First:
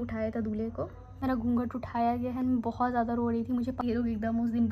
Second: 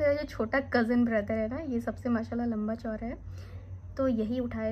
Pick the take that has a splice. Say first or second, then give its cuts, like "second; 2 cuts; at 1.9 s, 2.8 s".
first; 2 cuts; at 1.2 s, 3.8 s